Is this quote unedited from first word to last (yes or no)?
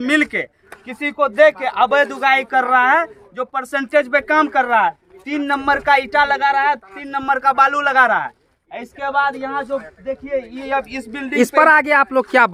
yes